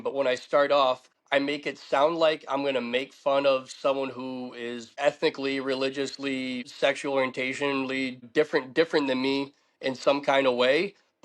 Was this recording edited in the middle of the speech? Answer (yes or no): yes